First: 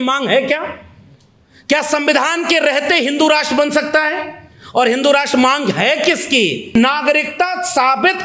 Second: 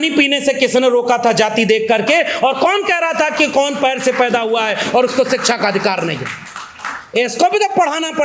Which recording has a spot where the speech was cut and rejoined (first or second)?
first